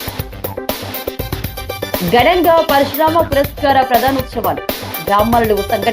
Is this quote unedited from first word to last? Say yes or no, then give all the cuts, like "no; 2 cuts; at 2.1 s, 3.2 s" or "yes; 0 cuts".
yes; 0 cuts